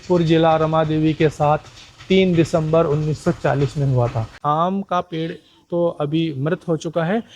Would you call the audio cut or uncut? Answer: cut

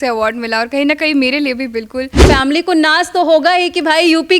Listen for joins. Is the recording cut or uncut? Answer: cut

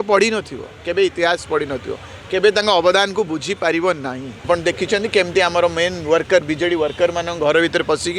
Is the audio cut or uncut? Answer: cut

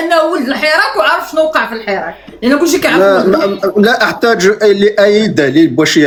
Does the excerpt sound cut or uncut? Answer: uncut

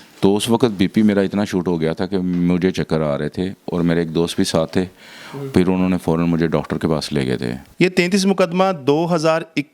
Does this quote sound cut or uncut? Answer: cut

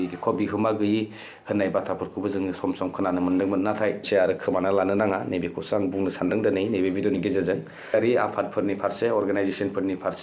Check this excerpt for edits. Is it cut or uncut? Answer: cut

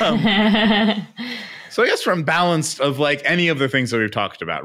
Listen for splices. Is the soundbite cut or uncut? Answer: uncut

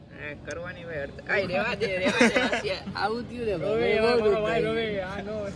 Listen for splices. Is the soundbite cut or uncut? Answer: uncut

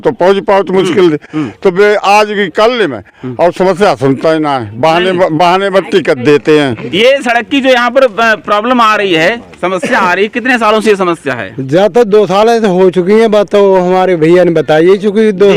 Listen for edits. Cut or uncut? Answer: uncut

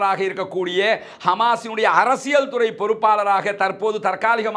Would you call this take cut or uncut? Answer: uncut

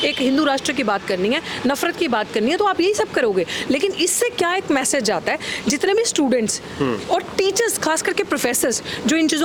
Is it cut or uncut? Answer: uncut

